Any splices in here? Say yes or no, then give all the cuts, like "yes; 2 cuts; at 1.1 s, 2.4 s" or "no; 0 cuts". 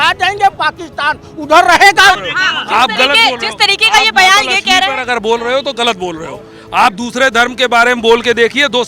yes; 1 cut; at 2.3 s